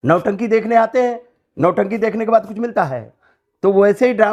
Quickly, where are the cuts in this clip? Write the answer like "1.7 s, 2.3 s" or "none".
none